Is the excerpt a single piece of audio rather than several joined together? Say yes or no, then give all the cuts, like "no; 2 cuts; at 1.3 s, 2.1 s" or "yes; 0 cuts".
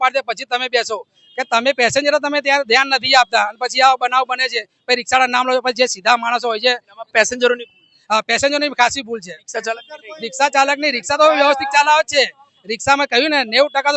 yes; 0 cuts